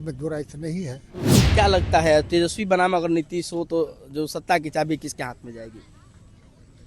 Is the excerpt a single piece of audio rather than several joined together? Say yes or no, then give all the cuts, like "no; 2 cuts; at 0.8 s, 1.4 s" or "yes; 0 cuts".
no; 1 cut; at 1.4 s